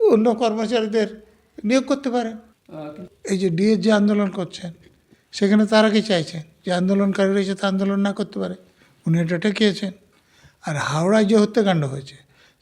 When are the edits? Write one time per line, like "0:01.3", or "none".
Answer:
0:03.1